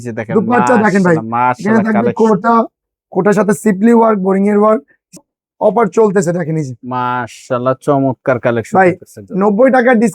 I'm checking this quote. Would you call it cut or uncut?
cut